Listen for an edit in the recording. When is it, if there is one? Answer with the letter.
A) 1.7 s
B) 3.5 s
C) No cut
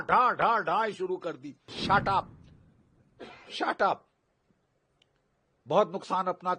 A